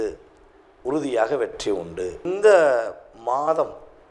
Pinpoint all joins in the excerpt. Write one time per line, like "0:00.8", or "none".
0:02.2